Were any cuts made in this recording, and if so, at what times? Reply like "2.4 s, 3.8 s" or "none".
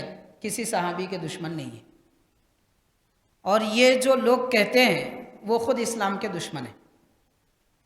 none